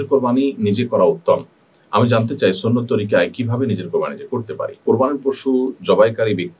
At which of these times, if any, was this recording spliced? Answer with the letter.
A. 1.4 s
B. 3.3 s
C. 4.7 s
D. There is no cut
C